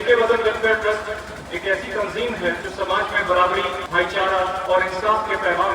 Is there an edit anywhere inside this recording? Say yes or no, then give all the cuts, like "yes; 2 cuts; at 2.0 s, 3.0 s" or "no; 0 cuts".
yes; 3 cuts; at 2.6 s, 3.8 s, 4.6 s